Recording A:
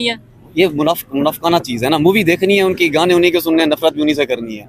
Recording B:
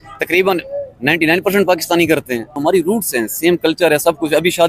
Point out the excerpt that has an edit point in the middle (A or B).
B